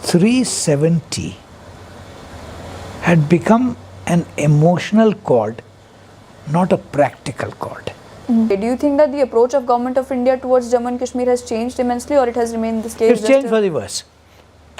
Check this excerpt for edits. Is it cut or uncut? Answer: cut